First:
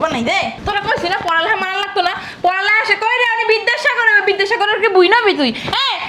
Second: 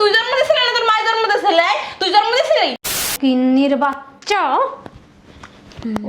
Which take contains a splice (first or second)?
second